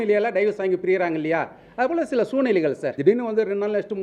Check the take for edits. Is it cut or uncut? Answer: cut